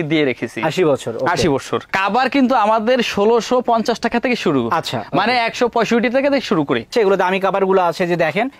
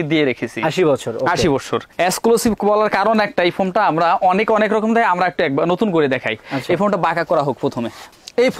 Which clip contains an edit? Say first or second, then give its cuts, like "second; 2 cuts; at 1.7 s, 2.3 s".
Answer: first; 2 cuts; at 1.9 s, 6.9 s